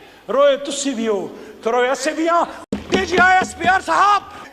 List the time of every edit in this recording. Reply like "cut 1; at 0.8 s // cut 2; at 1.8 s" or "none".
cut 1; at 2.6 s